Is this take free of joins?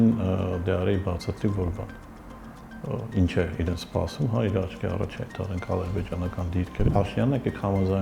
no; 1 cut; at 6.9 s

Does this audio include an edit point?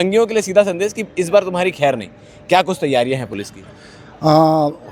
no; 0 cuts

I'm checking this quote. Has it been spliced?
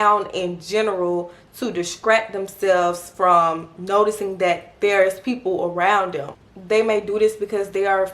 yes; 1 cut; at 6.3 s

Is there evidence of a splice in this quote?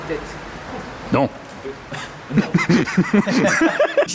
no; 0 cuts

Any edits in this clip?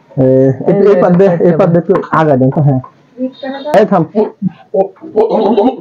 yes; 1 cut; at 3.7 s

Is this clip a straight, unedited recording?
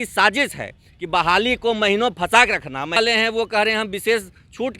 no; 1 cut; at 3.0 s

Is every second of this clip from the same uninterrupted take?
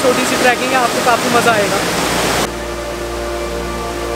yes; 0 cuts

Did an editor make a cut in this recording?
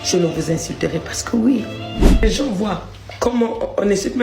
yes; 1 cut; at 2.2 s

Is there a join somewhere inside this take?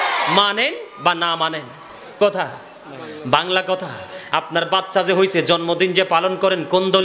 yes; 1 cut; at 2.2 s

